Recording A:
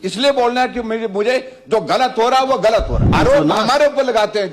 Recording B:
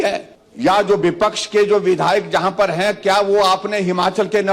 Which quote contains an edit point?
A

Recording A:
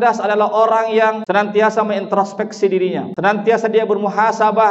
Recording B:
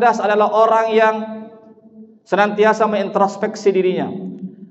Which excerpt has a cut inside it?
A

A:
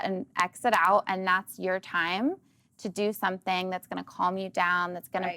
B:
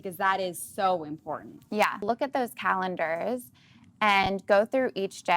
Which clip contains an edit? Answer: B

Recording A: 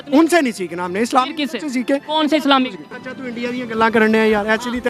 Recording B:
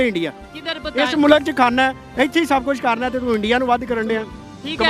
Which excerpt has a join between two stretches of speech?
A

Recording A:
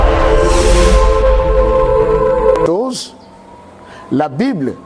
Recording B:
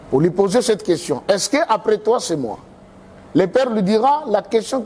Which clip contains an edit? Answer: A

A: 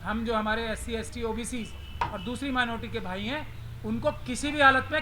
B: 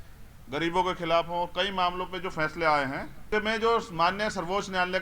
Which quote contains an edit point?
B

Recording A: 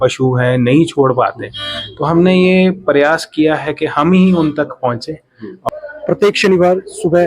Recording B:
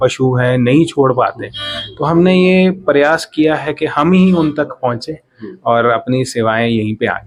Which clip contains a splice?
A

